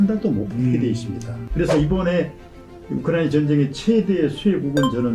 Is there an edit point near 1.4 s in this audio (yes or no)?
yes